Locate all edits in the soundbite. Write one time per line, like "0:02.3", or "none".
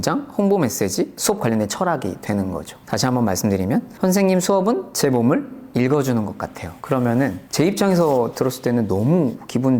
none